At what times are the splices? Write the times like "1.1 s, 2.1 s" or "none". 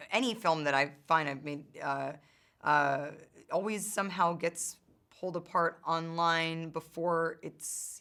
none